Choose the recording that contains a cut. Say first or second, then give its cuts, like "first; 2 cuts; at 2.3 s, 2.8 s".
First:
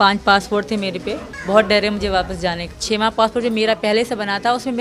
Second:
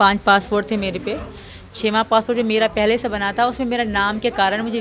first; 2 cuts; at 1.3 s, 2.7 s